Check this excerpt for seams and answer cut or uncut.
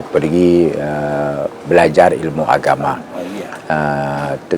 uncut